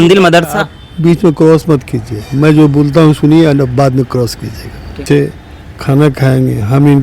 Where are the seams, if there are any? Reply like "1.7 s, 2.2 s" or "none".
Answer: 5.0 s